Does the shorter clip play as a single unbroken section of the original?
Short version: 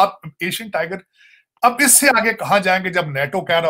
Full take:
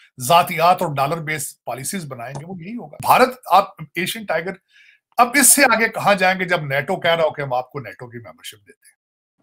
yes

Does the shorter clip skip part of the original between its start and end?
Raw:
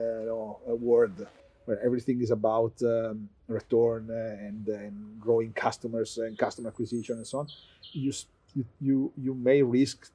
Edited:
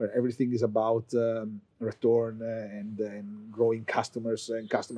no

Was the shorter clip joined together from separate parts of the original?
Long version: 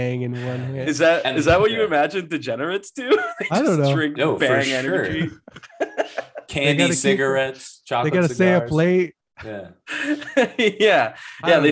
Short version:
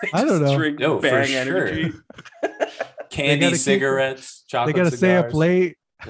no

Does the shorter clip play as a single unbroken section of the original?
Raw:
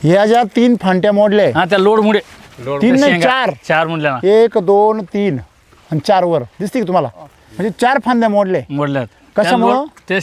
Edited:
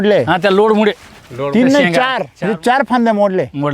no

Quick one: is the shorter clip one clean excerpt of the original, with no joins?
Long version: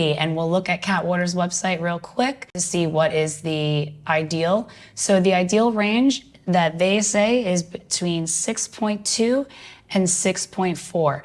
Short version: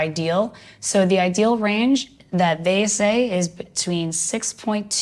yes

